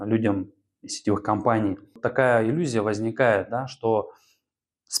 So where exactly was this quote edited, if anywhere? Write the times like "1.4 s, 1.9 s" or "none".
2.0 s